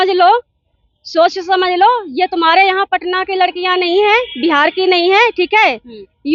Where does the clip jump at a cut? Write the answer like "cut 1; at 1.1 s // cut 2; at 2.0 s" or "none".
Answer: none